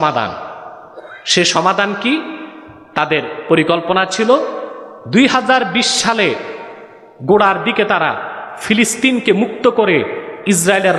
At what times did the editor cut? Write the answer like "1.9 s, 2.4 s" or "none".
none